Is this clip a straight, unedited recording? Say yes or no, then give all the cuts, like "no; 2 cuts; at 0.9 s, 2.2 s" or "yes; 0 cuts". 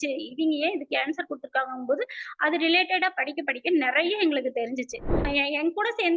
no; 1 cut; at 5.2 s